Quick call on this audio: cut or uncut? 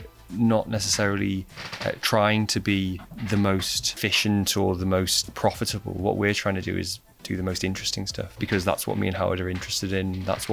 cut